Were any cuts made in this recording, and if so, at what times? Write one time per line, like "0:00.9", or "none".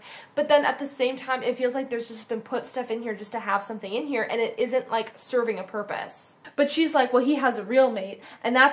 0:06.4